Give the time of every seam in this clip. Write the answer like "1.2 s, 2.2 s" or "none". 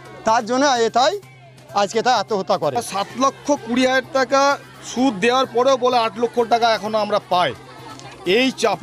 2.9 s